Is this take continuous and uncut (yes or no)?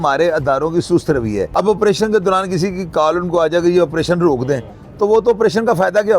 no